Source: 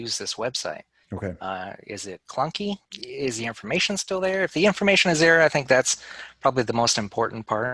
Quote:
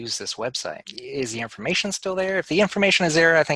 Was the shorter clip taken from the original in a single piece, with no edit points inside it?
no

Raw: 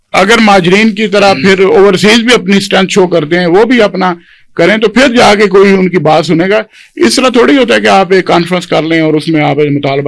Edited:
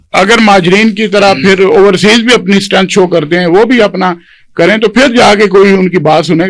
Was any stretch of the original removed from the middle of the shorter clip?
no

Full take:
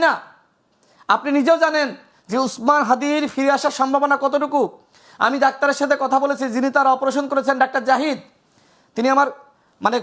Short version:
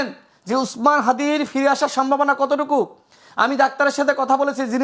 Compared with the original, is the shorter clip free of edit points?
yes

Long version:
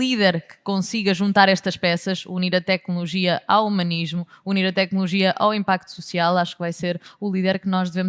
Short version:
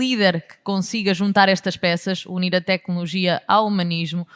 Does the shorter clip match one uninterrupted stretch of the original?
yes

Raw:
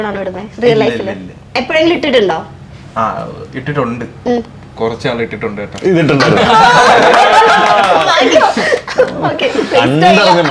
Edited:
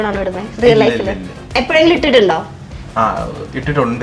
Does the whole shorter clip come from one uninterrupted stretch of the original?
yes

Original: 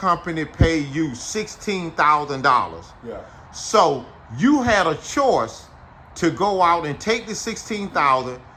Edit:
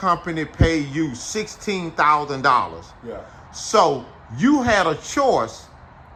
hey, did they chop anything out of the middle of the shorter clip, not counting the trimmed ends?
no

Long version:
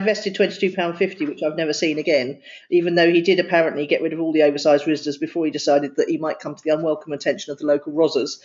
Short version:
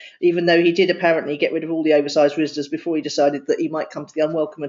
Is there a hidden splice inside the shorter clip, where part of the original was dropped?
no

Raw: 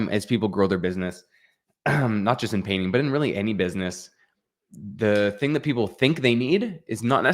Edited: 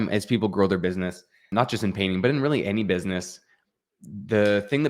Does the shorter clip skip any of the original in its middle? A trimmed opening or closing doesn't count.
yes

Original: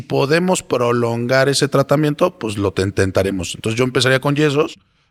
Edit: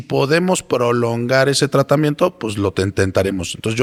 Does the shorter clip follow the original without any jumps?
yes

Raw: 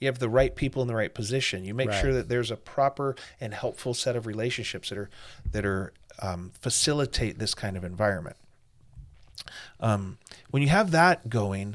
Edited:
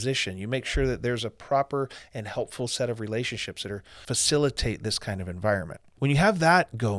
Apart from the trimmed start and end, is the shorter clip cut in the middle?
yes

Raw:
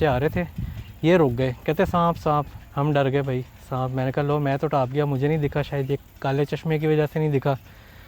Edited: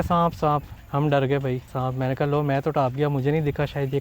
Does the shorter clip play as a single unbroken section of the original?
no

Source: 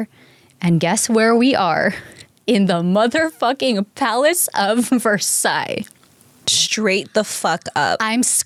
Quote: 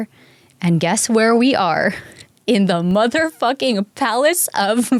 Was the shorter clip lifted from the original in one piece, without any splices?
yes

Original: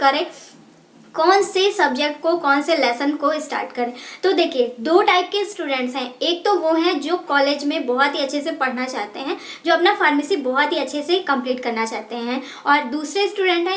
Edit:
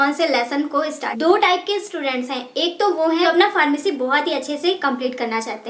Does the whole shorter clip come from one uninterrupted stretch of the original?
no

